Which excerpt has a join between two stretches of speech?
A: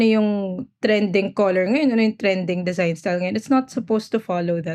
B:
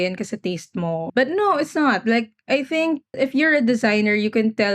B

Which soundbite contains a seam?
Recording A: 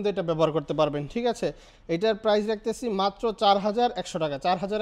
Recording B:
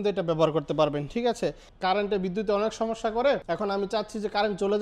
B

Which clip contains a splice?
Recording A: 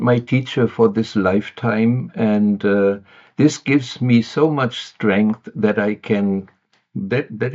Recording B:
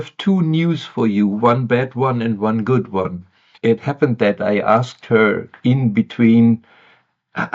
B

